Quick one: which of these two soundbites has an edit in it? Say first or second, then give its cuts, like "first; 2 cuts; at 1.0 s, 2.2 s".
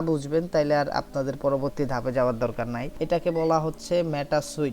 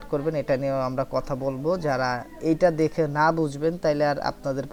first; 1 cut; at 2.9 s